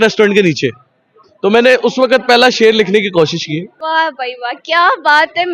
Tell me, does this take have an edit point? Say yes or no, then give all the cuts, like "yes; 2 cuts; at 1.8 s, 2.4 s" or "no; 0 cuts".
yes; 1 cut; at 3.7 s